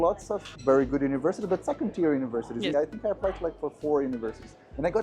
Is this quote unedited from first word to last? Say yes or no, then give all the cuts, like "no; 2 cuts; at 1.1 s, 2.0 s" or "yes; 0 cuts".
no; 1 cut; at 2.7 s